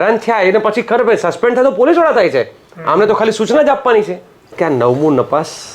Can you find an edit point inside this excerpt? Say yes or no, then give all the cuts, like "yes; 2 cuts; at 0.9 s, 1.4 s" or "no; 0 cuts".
yes; 1 cut; at 4.5 s